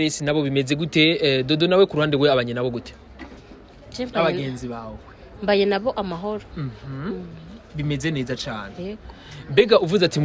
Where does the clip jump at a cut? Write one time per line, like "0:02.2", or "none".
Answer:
none